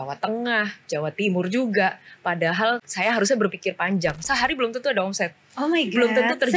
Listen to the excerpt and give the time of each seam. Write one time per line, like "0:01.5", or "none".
0:02.9
0:04.2